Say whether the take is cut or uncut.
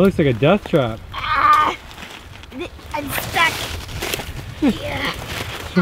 uncut